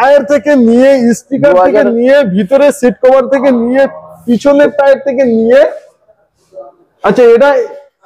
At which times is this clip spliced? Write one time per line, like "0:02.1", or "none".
none